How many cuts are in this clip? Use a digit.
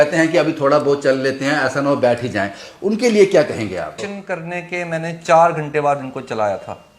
1